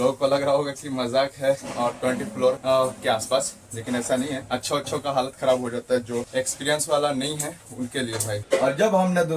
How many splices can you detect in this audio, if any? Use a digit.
4